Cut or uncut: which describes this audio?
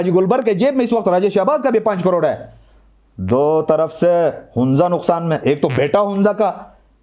uncut